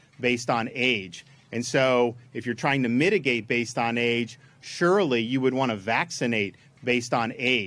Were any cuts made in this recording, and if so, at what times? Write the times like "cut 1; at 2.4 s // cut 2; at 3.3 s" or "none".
cut 1; at 6.6 s